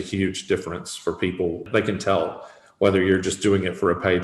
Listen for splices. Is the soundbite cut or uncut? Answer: cut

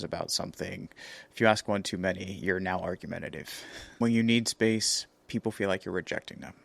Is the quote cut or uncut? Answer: cut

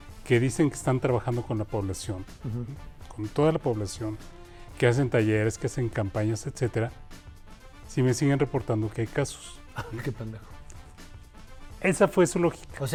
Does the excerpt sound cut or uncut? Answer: uncut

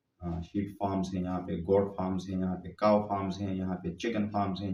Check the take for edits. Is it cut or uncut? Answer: uncut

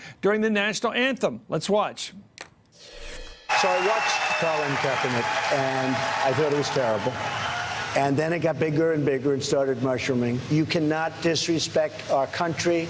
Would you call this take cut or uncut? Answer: cut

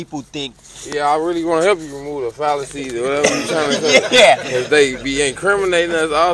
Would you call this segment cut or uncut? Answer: uncut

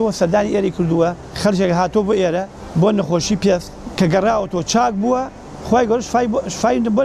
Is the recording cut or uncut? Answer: cut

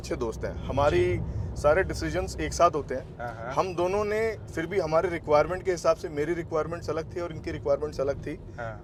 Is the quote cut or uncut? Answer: uncut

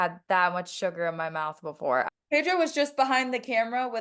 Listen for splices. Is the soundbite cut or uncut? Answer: cut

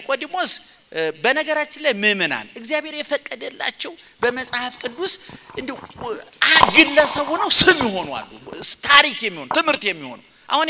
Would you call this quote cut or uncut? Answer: uncut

